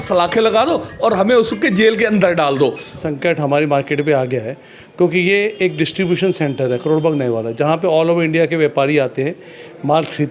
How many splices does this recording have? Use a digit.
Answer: 1